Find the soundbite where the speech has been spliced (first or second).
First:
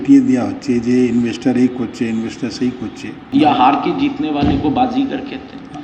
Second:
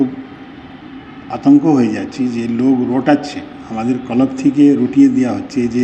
first